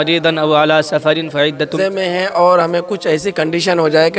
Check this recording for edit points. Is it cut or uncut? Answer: cut